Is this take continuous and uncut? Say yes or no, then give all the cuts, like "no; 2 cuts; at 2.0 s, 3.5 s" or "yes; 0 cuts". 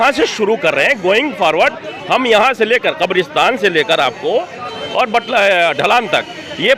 yes; 0 cuts